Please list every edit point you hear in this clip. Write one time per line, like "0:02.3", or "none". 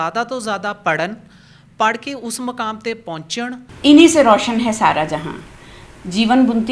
0:03.7

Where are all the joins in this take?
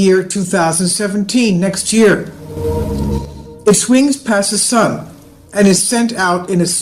0:04.8

